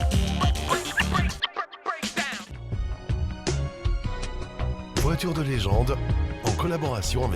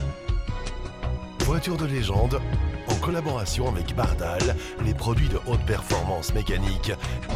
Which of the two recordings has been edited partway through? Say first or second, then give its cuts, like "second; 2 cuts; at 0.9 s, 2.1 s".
first; 1 cut; at 2.6 s